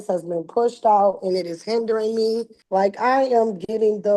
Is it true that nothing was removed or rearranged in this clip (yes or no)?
no